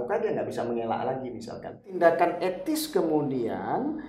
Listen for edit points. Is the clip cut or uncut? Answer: cut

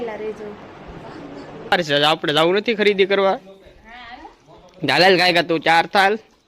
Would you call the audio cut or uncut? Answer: cut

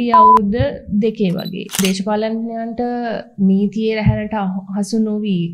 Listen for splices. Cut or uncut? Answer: cut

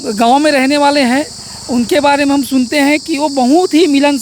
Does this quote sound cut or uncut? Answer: uncut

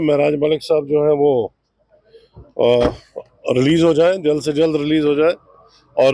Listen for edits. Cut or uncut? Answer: uncut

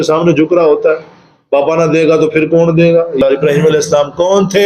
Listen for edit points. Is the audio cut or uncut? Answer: cut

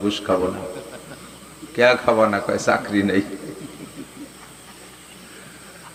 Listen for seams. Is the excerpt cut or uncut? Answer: uncut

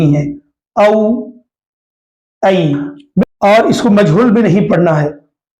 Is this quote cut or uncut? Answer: cut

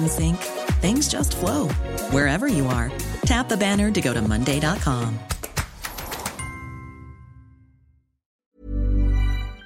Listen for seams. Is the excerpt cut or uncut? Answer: cut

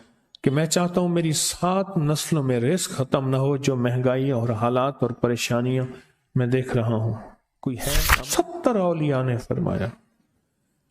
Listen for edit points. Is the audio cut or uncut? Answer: cut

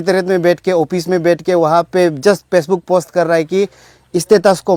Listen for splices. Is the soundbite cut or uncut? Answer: uncut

